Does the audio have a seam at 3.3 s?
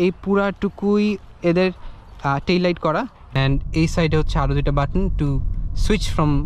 yes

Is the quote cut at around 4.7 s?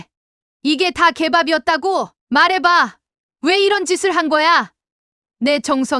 no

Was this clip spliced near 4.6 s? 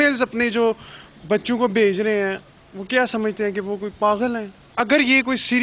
yes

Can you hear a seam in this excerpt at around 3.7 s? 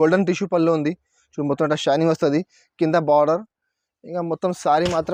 no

